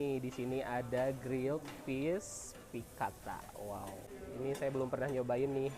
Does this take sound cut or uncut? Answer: cut